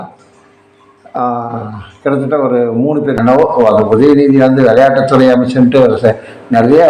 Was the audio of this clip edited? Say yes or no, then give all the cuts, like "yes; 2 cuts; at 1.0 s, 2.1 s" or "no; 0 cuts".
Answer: yes; 1 cut; at 3.2 s